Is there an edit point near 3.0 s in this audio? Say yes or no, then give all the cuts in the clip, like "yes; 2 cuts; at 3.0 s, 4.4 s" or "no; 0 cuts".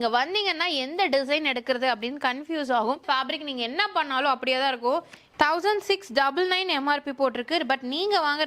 yes; 2 cuts; at 3.0 s, 5.3 s